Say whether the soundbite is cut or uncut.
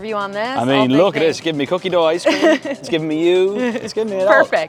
uncut